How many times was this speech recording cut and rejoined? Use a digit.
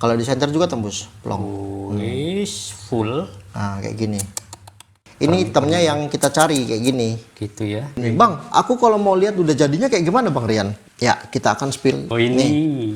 4